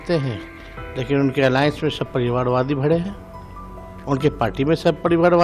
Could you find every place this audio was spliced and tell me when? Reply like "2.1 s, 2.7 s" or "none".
none